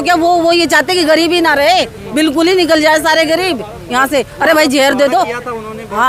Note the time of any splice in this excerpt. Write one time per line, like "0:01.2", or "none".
none